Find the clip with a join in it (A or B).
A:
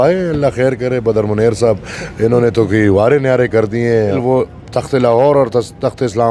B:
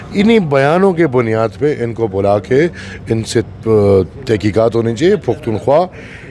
A